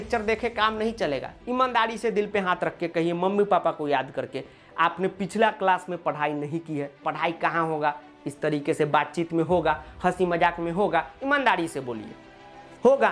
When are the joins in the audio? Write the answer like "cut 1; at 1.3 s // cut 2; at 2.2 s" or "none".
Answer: cut 1; at 1.4 s // cut 2; at 7.0 s